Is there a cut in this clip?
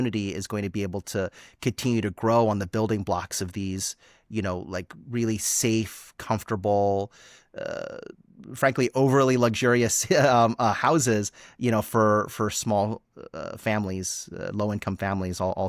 no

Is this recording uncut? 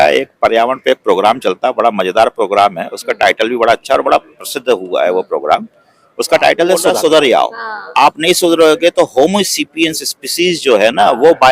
no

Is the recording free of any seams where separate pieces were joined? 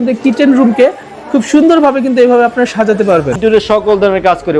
no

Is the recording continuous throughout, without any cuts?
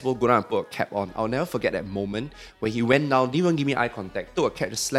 yes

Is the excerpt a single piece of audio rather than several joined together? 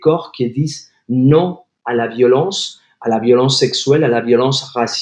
yes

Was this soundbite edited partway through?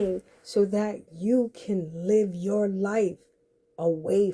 no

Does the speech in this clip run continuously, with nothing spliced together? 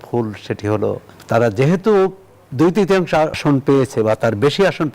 no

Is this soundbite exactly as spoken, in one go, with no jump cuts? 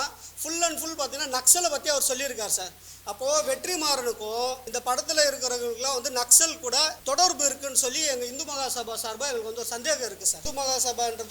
no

